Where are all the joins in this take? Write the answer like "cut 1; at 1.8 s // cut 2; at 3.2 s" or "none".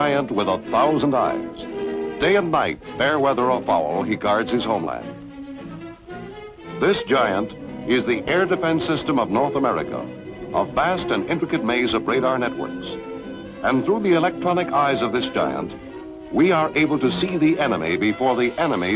none